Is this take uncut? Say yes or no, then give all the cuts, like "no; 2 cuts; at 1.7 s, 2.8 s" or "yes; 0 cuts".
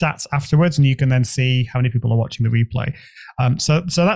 yes; 0 cuts